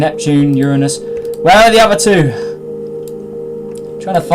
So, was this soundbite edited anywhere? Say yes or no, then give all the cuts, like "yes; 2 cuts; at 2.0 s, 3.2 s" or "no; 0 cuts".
yes; 1 cut; at 1.3 s